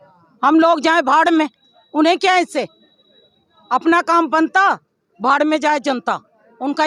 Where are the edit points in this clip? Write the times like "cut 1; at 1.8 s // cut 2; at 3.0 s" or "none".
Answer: none